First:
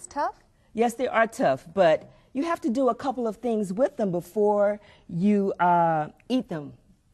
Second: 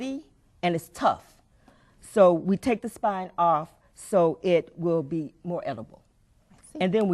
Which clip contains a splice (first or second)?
second